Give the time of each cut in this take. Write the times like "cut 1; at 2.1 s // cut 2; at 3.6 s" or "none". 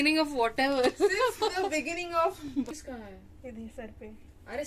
cut 1; at 2.7 s